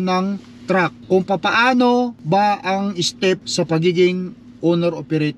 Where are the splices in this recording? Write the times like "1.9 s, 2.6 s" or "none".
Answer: 1.0 s, 2.2 s, 3.5 s